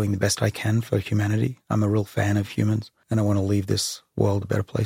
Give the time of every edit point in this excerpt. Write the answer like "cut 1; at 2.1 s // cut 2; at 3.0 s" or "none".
cut 1; at 2.9 s